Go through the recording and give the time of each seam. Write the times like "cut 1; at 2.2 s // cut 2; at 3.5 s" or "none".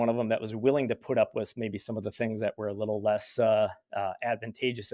none